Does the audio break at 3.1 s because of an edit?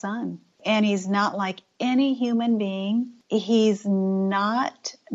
yes; 1 cut; at 3.1 s

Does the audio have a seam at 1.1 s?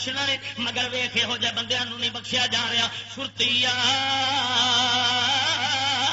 no; 0 cuts

